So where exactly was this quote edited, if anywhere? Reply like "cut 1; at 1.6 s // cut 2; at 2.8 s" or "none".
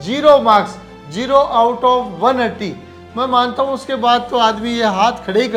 none